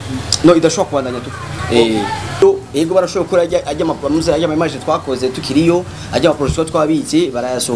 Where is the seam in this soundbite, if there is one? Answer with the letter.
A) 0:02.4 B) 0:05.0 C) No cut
A